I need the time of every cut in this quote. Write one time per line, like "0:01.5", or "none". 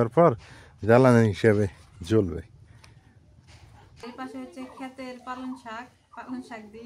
0:03.9